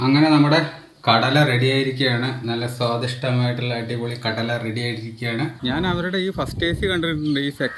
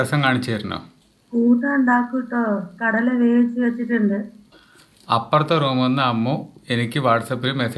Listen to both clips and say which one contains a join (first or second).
first